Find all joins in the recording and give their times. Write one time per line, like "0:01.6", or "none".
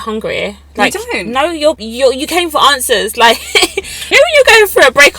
0:01.9
0:04.1

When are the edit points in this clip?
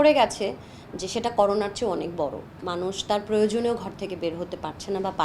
none

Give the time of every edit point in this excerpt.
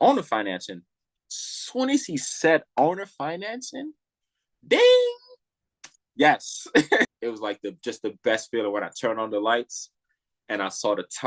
0:07.2

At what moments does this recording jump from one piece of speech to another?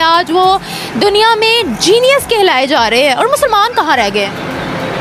none

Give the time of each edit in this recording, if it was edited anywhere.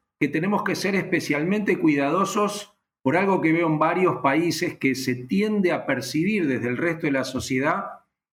none

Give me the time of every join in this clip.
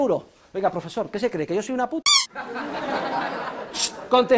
0:02.0

